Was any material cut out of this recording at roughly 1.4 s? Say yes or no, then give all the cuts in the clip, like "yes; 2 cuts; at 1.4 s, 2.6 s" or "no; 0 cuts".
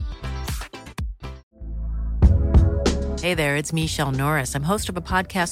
yes; 1 cut; at 1.4 s